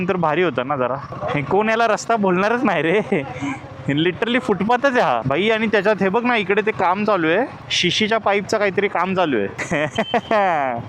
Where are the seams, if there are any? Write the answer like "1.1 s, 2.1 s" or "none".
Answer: 1.1 s, 5.2 s, 9.3 s